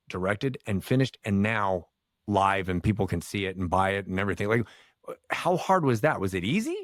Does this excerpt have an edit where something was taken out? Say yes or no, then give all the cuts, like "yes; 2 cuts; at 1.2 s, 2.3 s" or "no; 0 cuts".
no; 0 cuts